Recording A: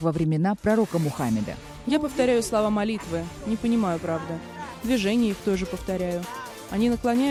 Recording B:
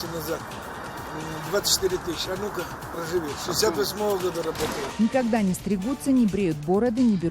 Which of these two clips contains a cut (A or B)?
B